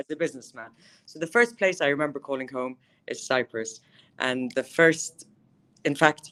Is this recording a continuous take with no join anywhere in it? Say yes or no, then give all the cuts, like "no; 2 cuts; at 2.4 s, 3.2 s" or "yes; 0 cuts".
yes; 0 cuts